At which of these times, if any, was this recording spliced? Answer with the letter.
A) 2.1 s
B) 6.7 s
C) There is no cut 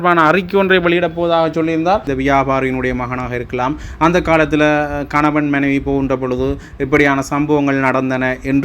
A